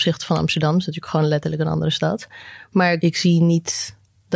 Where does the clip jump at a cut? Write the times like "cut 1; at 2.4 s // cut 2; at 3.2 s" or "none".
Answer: cut 1; at 3.0 s